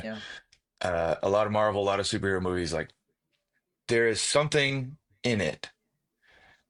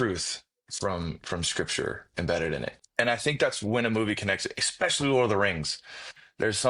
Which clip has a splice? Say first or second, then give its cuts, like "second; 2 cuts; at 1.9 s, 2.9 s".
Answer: second; 1 cut; at 2.7 s